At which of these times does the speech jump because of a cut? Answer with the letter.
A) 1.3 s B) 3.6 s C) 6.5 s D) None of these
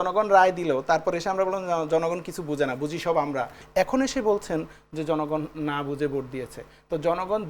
B